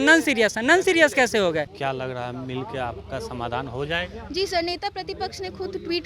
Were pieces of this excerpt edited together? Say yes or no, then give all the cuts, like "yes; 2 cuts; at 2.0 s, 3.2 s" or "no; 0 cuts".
yes; 1 cut; at 1.7 s